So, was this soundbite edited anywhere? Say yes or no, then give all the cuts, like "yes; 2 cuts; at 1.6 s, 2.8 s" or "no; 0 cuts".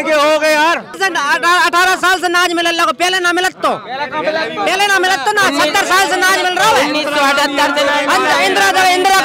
yes; 1 cut; at 1.0 s